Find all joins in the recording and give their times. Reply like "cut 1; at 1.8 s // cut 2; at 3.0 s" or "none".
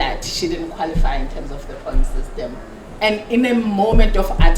cut 1; at 2.8 s